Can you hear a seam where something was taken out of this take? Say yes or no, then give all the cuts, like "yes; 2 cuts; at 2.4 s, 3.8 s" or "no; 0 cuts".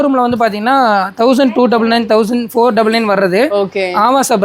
no; 0 cuts